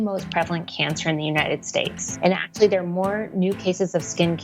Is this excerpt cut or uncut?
cut